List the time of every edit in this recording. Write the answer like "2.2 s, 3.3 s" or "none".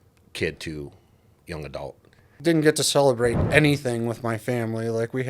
2.3 s